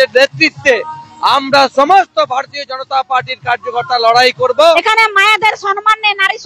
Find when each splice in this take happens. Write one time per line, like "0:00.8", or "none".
0:04.8